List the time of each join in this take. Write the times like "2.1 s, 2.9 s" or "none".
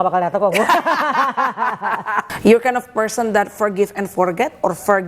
2.3 s